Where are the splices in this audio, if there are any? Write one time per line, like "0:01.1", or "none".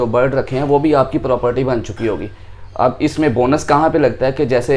none